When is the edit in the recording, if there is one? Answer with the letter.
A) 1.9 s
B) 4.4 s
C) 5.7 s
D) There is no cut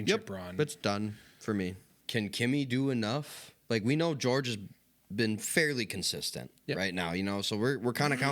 A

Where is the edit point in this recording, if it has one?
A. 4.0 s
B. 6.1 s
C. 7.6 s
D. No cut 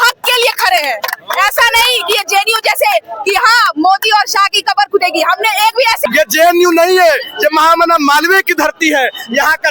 B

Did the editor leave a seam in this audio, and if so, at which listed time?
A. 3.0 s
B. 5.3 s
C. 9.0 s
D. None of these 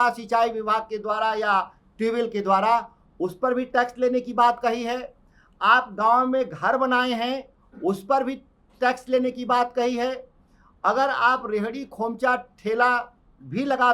D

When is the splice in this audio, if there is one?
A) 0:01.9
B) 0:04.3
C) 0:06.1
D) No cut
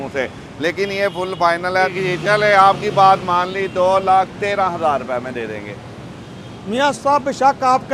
A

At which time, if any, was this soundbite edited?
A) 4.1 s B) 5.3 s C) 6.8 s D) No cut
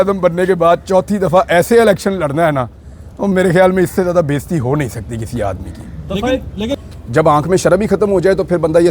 C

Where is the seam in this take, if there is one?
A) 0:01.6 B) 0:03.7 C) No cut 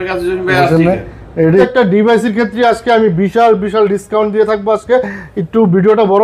A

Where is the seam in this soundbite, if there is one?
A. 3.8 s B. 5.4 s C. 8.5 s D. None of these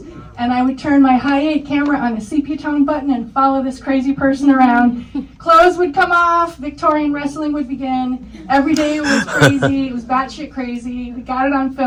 D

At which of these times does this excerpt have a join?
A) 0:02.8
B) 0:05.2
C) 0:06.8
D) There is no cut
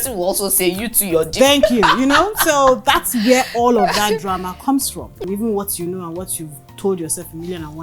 B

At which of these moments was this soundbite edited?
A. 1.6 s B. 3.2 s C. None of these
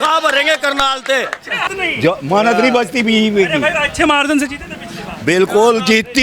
A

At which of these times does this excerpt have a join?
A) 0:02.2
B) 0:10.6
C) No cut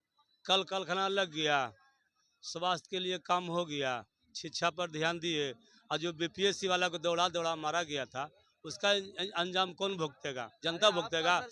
C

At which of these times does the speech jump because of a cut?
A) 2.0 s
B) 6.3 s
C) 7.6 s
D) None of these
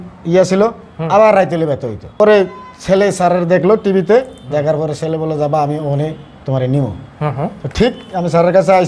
A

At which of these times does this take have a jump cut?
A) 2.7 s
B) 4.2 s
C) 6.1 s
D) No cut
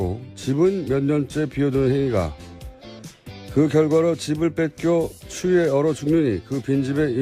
C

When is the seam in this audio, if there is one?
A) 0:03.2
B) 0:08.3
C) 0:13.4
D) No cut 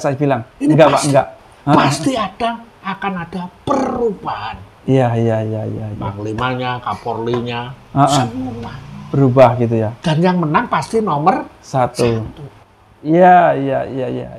D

